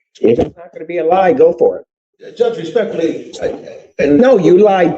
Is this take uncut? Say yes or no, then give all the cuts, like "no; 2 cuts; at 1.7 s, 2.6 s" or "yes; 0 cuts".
yes; 0 cuts